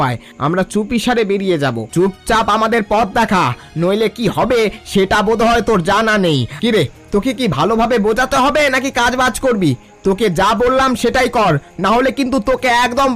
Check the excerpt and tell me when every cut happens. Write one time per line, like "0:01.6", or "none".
0:01.8
0:06.5